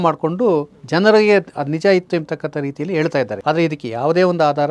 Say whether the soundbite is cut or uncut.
cut